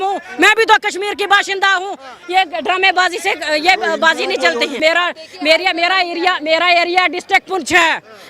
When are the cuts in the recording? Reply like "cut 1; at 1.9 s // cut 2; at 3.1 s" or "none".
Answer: cut 1; at 4.8 s